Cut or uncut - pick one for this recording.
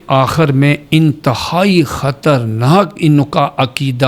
uncut